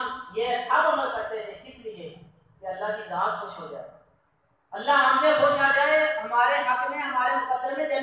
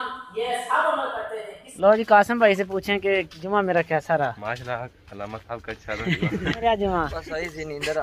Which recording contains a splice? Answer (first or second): second